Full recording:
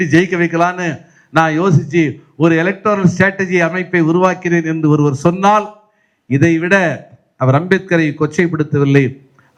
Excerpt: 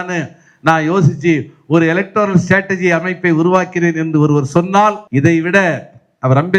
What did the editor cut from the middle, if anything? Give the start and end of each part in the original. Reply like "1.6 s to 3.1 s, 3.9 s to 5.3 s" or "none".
5.7 s to 6.2 s